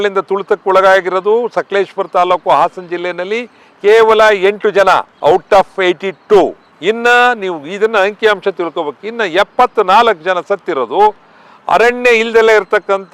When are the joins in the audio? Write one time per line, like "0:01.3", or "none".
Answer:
none